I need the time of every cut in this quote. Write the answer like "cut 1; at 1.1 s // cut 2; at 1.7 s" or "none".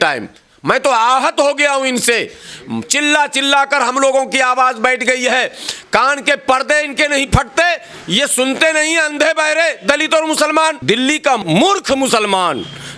cut 1; at 11.4 s